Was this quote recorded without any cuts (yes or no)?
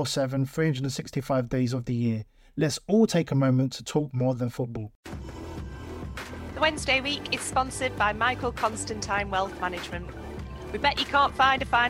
no